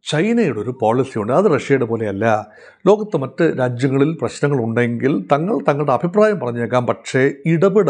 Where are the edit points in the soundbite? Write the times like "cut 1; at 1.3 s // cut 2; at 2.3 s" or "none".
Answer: none